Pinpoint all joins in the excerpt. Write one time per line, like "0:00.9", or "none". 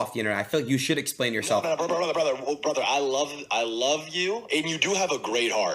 0:04.4